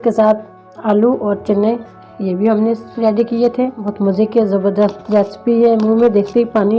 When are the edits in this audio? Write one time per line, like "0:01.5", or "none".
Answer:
0:03.8